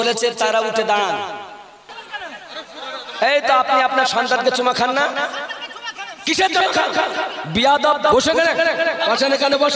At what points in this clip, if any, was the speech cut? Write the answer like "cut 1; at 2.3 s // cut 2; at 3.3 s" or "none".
cut 1; at 1.9 s